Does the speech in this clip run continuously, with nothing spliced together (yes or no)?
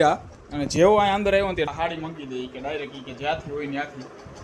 no